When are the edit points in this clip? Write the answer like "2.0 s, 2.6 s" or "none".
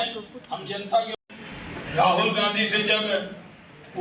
1.2 s